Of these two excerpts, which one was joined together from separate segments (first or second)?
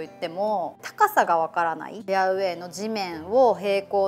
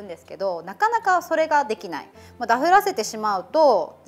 first